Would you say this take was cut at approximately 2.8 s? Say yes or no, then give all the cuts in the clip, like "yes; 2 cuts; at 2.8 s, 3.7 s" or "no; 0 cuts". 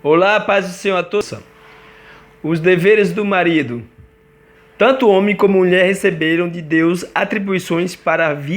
no; 1 cut; at 1.2 s